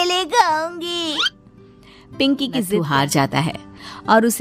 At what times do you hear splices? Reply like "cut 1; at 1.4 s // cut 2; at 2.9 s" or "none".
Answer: cut 1; at 2.7 s